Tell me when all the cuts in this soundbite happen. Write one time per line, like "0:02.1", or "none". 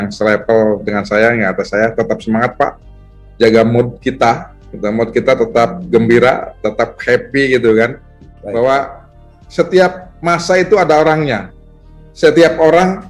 0:08.4